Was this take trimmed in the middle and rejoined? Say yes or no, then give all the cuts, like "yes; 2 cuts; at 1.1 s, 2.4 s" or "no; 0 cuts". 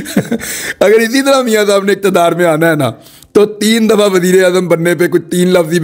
no; 0 cuts